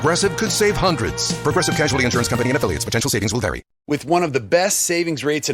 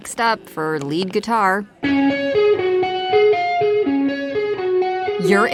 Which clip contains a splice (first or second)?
first